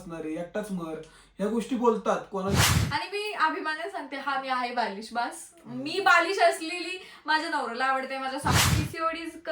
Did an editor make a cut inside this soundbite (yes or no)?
yes